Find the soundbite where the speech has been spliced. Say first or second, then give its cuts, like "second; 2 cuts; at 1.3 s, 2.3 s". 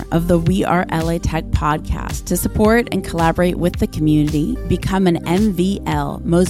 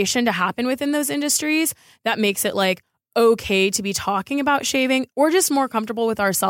second; 1 cut; at 5.1 s